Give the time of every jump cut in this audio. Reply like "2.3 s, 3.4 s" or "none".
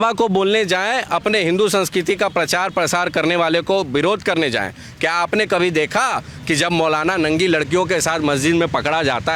none